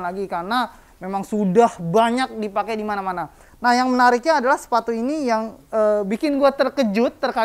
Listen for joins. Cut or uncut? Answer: uncut